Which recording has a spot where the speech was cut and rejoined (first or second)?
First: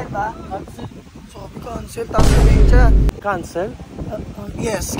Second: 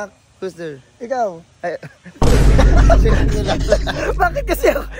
first